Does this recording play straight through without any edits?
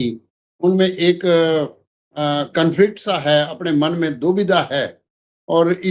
yes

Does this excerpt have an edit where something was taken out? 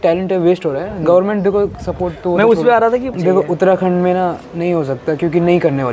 yes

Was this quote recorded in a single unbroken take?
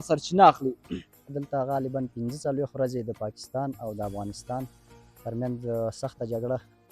no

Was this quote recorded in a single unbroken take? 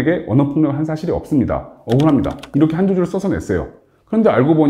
yes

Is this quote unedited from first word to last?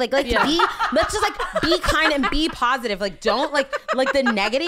yes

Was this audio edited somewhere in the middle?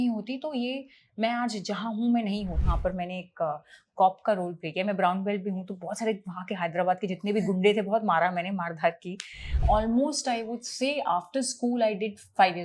yes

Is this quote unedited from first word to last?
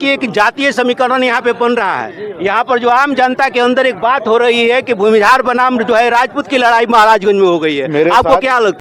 yes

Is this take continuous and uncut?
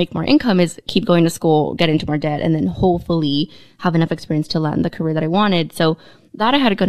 yes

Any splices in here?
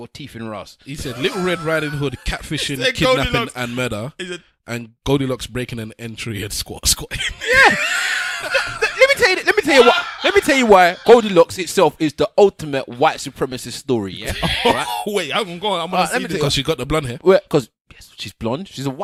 no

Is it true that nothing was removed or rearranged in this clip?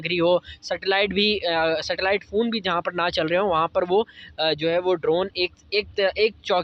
yes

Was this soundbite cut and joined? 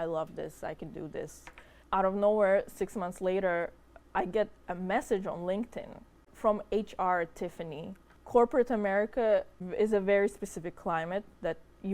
yes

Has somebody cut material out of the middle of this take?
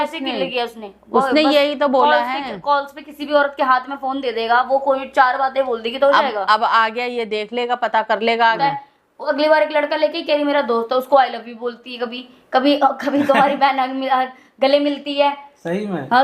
yes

